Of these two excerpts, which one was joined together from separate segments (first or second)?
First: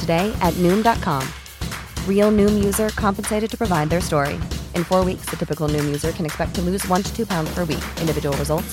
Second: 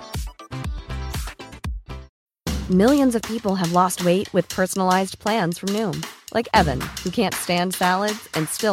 second